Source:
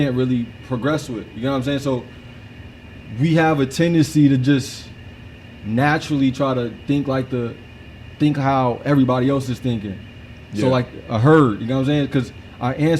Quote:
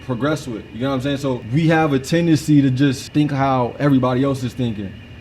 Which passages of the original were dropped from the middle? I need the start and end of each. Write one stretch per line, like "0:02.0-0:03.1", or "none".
0:02.1-0:03.1
0:04.7-0:08.1